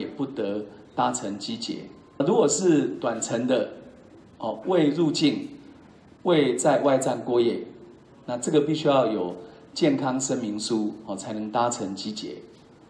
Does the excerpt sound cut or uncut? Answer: cut